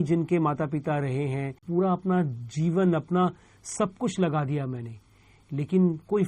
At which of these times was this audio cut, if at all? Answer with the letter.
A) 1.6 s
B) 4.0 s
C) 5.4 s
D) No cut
A